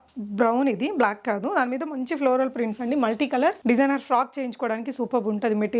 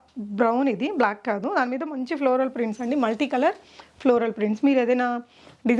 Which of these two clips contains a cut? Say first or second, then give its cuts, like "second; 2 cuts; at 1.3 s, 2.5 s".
first; 1 cut; at 3.6 s